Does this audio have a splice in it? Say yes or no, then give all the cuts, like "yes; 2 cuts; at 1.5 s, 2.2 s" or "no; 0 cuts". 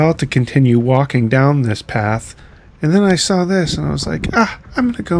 no; 0 cuts